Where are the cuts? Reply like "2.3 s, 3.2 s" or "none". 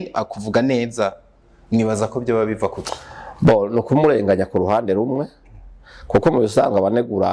none